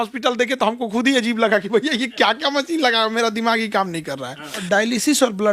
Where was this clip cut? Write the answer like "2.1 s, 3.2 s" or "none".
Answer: 4.6 s